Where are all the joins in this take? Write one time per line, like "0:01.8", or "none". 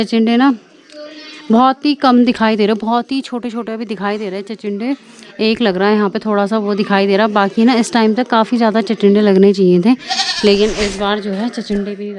none